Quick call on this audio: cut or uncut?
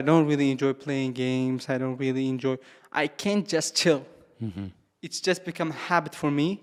uncut